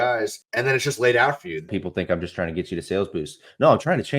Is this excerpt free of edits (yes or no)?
no